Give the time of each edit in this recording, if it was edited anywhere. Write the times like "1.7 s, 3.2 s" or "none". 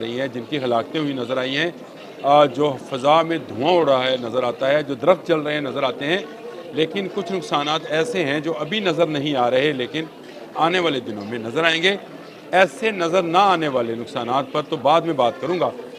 none